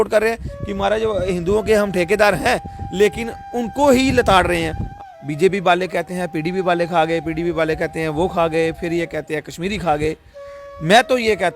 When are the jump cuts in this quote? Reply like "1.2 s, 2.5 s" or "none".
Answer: 4.9 s